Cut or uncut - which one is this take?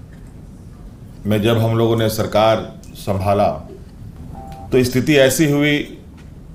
uncut